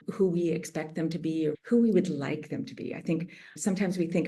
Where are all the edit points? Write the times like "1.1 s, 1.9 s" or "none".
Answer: none